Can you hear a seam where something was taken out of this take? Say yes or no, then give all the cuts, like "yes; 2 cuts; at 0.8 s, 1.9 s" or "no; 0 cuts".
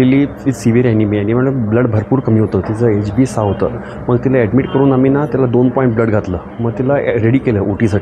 no; 0 cuts